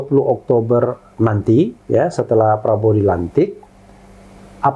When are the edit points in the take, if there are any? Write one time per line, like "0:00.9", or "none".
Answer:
none